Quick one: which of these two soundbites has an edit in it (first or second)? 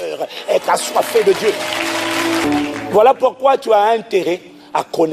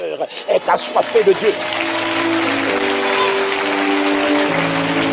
first